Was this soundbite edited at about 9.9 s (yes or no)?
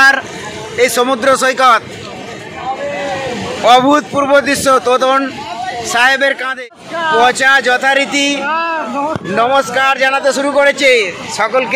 no